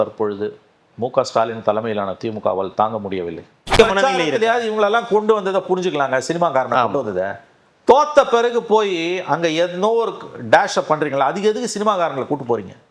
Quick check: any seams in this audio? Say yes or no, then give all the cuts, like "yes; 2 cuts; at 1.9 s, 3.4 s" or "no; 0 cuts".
yes; 1 cut; at 3.7 s